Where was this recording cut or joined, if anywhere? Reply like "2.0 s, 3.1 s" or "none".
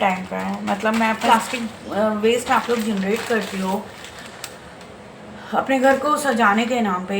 1.2 s

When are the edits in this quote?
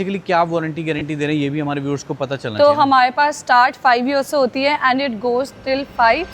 none

